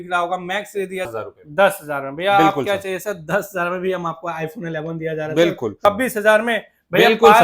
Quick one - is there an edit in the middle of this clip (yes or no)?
yes